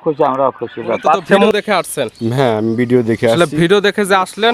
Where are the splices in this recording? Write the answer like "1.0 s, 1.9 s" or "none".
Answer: 1.5 s